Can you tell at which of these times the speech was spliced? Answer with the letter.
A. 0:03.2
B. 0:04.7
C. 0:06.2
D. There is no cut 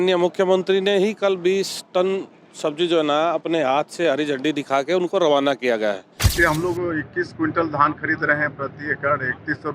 C